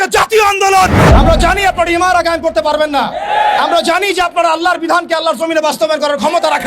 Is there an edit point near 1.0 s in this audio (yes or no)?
yes